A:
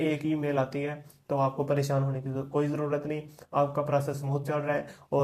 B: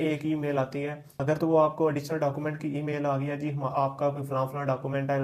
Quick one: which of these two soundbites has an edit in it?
B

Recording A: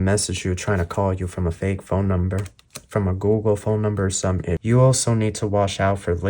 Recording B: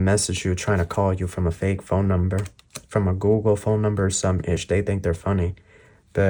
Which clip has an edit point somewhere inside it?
A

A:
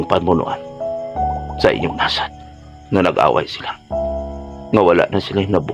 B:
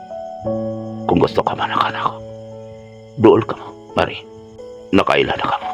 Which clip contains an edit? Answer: B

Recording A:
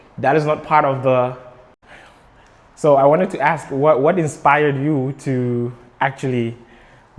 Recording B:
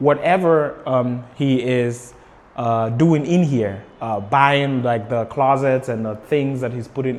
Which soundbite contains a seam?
A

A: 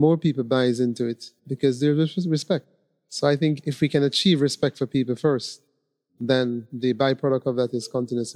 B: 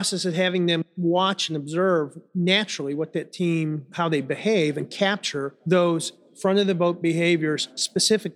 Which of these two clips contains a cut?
B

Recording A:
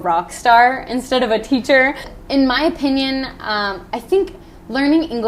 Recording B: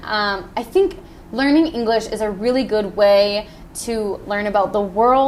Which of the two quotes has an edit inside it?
A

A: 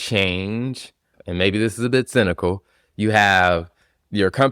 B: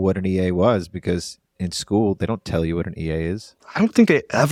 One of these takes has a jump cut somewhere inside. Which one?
A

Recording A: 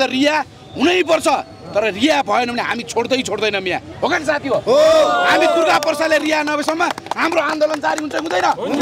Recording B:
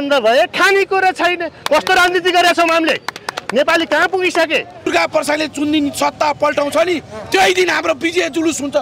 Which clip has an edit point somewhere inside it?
B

